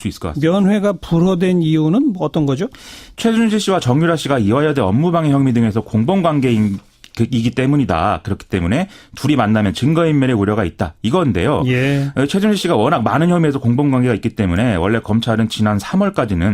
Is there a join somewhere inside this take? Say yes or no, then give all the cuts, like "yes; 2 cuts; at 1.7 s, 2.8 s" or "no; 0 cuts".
no; 0 cuts